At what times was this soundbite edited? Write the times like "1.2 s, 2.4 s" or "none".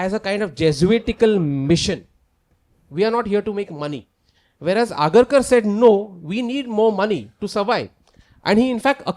none